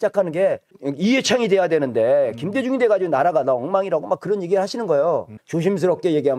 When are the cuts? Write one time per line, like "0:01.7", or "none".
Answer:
0:05.4